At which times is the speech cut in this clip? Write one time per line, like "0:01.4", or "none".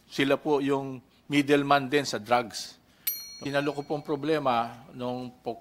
0:03.4